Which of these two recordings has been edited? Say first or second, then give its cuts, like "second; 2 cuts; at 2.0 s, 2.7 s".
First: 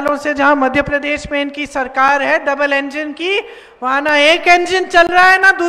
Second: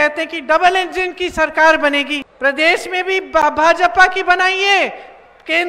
second; 1 cut; at 2.2 s